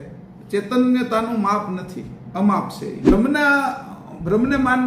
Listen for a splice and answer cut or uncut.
cut